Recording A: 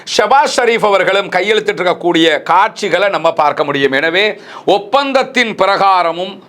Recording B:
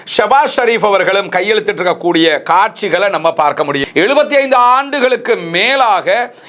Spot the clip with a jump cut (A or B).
B